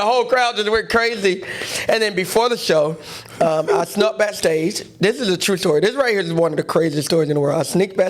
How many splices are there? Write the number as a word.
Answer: zero